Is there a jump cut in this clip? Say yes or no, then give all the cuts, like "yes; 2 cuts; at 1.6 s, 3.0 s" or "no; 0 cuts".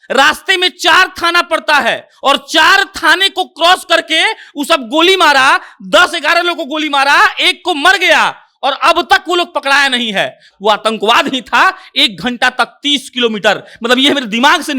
yes; 1 cut; at 10.5 s